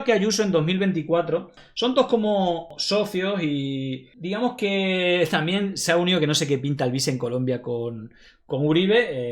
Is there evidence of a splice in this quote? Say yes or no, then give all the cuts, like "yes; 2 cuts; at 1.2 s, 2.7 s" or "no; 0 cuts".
yes; 2 cuts; at 1.6 s, 2.7 s